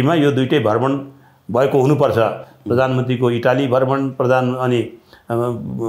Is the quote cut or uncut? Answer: uncut